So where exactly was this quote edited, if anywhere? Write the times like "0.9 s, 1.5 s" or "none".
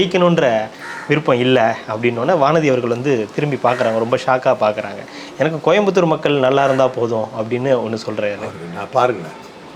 none